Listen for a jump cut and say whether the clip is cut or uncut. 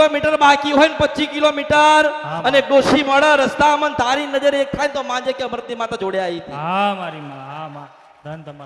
uncut